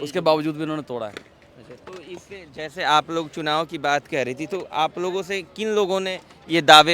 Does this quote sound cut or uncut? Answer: uncut